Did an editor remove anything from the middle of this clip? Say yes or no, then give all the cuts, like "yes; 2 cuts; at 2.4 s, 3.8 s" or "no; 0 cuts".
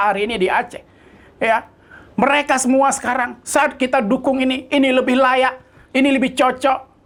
no; 0 cuts